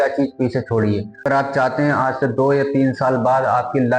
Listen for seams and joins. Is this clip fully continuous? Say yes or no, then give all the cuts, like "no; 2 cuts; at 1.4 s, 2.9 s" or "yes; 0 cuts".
no; 1 cut; at 1.1 s